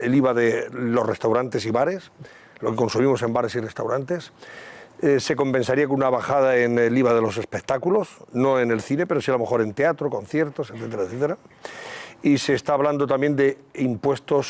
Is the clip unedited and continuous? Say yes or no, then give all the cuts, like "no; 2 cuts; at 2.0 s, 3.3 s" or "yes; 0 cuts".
yes; 0 cuts